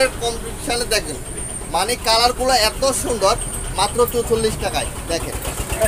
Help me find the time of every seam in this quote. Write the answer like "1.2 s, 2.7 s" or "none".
none

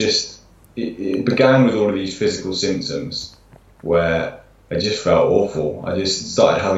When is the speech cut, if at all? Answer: none

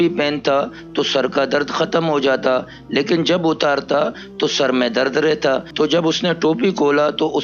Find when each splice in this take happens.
5.7 s

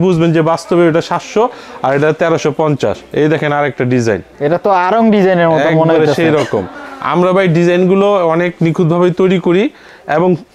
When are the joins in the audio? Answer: none

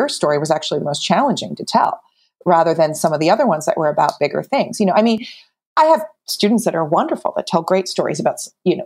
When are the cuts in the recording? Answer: none

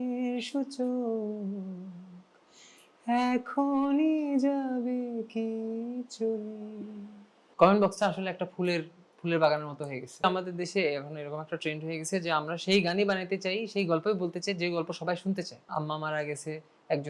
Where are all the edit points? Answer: 7.5 s, 10.2 s, 15.7 s

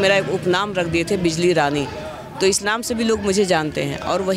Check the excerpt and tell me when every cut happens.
none

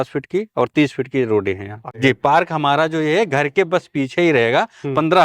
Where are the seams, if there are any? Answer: 1.9 s

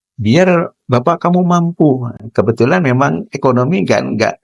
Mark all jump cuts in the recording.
none

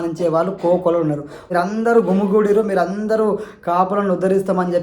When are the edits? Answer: 1.3 s

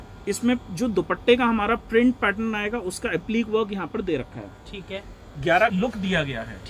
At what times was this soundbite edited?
5.7 s

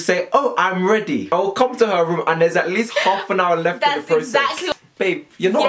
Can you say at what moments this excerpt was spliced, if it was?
1.3 s, 4.6 s

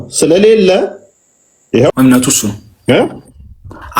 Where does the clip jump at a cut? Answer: 1.9 s

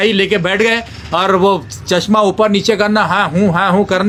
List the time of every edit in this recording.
none

